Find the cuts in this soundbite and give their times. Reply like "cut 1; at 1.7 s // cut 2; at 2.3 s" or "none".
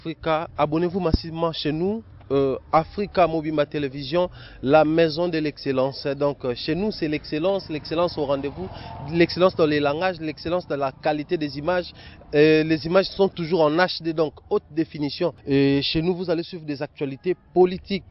none